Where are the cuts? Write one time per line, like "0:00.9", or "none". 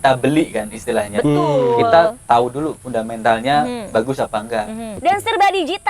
0:04.9

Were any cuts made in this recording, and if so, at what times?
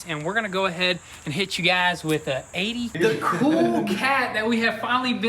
0:02.9

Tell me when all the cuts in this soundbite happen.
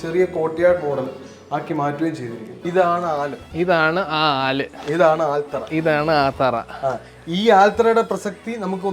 0:02.6

